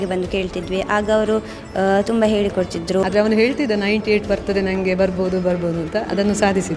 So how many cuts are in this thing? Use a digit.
1